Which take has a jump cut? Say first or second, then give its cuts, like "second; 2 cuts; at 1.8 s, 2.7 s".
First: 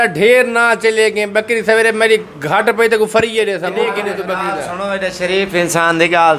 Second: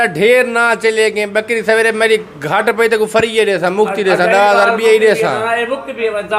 first; 1 cut; at 3.7 s